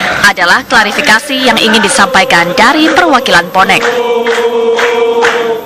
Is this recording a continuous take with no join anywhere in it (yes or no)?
yes